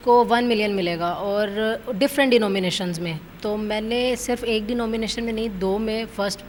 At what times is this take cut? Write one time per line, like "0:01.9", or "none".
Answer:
none

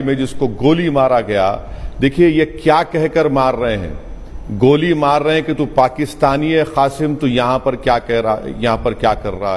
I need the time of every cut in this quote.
none

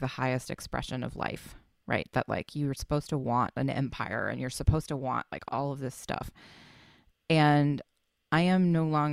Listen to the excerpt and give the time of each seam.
0:05.3

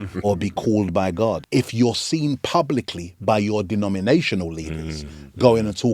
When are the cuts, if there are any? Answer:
0:01.4

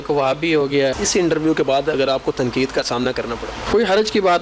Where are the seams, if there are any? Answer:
0:01.0
0:03.6

